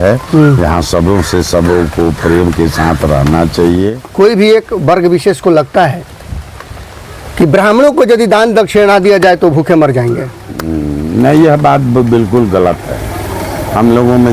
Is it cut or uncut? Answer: cut